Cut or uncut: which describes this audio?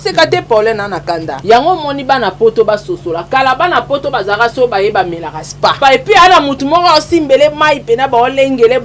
cut